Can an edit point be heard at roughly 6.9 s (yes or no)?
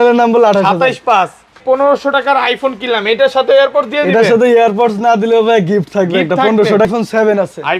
yes